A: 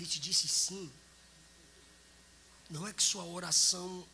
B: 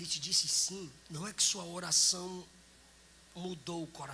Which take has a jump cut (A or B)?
B